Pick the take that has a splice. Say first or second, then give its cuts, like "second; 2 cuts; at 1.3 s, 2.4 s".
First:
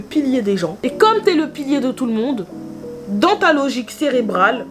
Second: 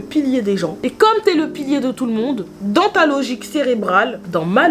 second; 1 cut; at 2.5 s